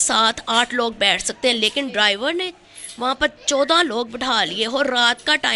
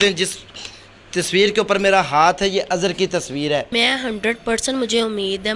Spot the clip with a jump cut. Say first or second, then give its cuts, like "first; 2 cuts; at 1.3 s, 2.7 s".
second; 1 cut; at 3.7 s